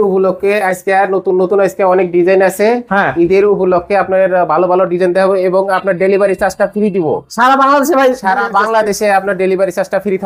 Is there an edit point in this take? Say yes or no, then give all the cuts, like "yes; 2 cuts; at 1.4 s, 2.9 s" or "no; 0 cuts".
no; 0 cuts